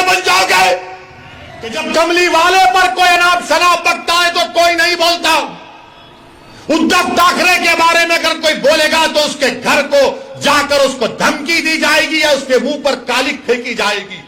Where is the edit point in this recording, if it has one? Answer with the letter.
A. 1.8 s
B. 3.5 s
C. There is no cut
A